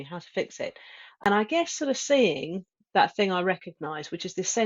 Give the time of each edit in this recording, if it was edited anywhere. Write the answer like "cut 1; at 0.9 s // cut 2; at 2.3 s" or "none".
cut 1; at 1.2 s